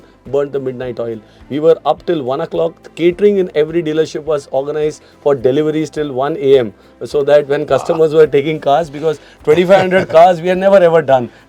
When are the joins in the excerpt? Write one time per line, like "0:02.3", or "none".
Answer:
none